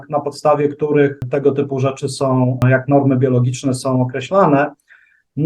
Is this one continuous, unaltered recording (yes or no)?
no